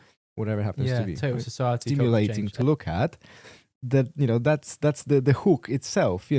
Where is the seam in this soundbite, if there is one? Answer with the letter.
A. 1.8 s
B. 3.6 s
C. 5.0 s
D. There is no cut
A